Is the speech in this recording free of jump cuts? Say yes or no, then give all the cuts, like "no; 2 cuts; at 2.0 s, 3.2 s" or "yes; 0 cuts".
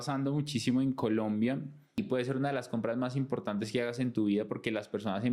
no; 1 cut; at 2.0 s